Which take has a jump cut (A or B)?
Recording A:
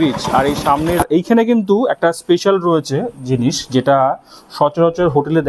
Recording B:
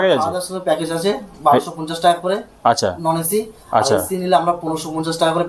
A